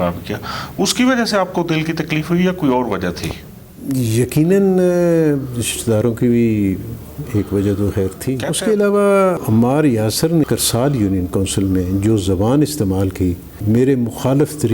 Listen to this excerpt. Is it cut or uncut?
cut